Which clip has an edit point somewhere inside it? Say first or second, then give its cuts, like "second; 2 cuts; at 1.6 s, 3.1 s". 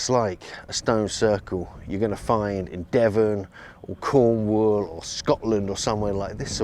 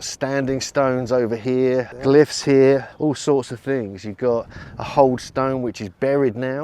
second; 2 cuts; at 1.9 s, 2.9 s